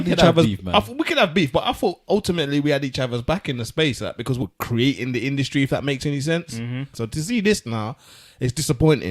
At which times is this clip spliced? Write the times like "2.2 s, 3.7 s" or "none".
4.4 s, 6.9 s